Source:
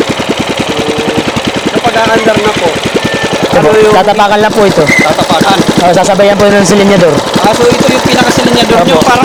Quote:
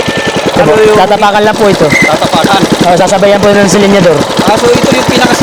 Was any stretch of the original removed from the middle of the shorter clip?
no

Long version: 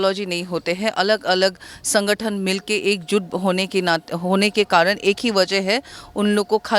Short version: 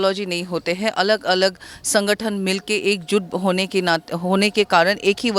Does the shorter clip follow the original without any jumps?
yes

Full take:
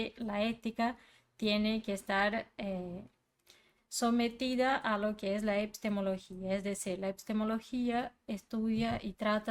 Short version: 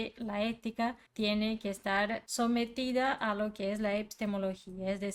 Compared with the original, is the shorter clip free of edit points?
no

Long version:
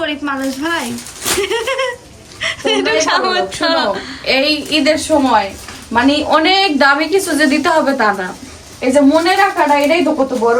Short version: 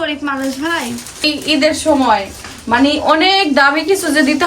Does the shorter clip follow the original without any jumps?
no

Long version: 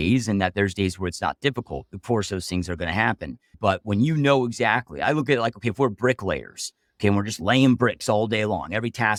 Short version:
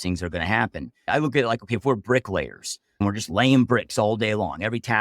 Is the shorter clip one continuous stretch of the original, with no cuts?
no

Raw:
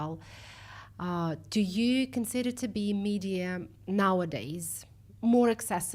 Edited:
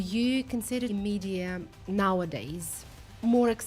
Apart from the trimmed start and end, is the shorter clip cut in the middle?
yes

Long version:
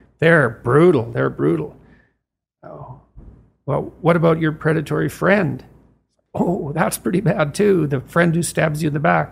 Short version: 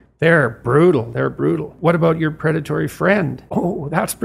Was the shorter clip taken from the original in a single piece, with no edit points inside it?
no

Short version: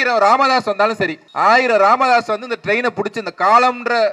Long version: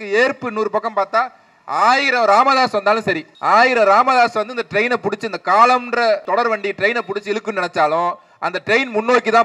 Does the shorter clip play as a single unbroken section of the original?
yes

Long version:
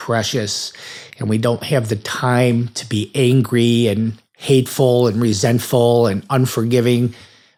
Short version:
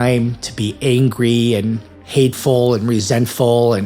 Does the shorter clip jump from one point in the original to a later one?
no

